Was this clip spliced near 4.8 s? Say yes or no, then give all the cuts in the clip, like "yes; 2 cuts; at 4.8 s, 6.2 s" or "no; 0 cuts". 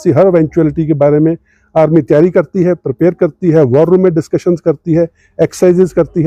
yes; 1 cut; at 4.8 s